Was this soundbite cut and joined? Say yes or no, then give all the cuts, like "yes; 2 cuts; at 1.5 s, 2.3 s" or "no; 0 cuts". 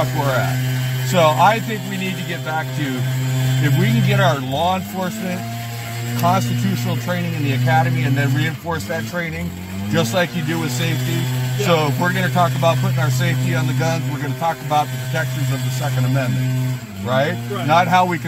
no; 0 cuts